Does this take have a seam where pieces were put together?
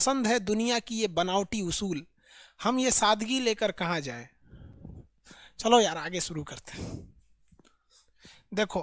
no; 0 cuts

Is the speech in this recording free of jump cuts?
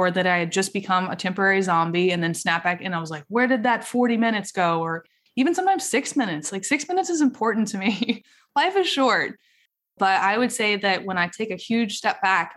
no; 1 cut; at 10.0 s

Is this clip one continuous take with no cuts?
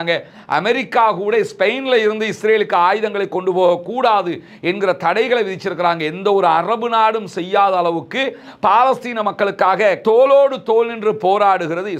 yes; 0 cuts

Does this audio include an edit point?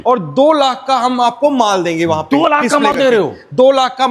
no; 0 cuts

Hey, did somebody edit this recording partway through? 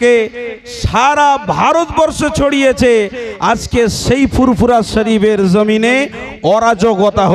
no; 0 cuts

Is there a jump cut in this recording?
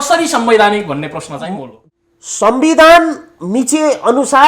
yes; 1 cut; at 1.6 s

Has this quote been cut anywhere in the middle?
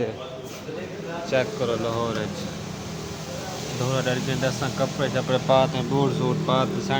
no; 0 cuts

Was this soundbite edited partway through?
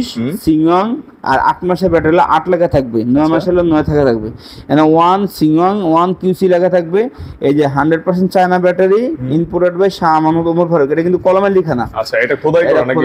no; 0 cuts

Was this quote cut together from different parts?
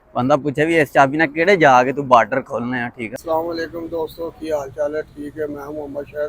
yes; 1 cut; at 3.1 s

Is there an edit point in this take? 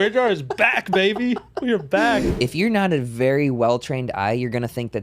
yes; 1 cut; at 2.3 s

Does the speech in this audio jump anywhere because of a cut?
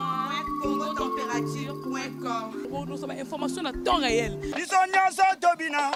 no; 0 cuts

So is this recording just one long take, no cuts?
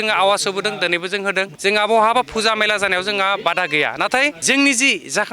no; 2 cuts; at 1.5 s, 4.4 s

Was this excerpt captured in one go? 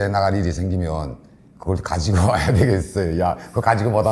yes; 0 cuts

